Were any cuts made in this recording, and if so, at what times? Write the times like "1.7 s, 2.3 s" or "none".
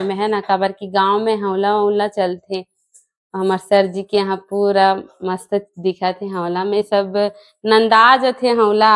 none